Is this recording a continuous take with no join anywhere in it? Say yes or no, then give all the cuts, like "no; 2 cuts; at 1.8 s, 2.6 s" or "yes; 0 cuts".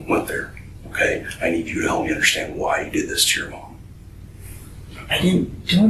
yes; 0 cuts